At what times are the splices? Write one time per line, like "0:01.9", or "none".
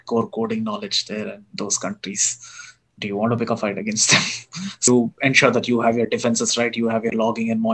0:04.9